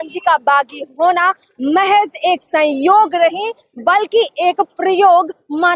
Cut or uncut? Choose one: uncut